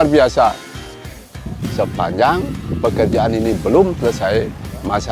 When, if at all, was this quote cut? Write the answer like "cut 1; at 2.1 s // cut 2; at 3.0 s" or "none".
cut 1; at 1.1 s